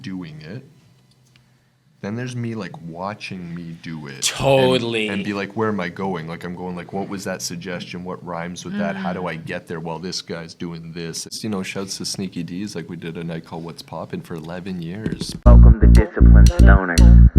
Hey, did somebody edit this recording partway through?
yes; 2 cuts; at 11.4 s, 15.5 s

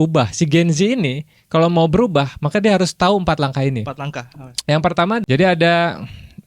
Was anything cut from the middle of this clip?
yes; 1 cut; at 5.2 s

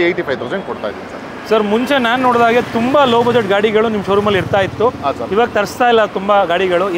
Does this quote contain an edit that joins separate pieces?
no; 0 cuts

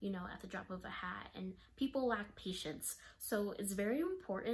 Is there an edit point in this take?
no; 0 cuts

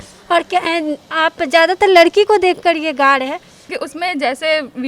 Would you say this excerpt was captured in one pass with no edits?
no; 1 cut; at 3.6 s

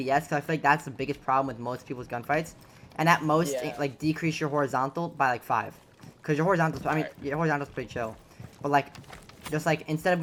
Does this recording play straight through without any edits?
yes; 0 cuts

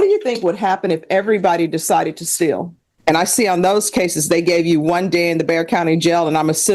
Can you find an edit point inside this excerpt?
yes; 1 cut; at 2.9 s

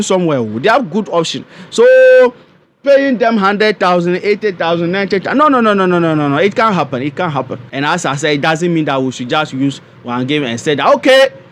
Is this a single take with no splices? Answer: no; 1 cut; at 7.6 s

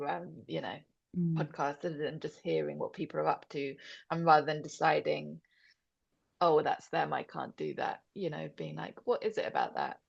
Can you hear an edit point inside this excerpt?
no; 0 cuts

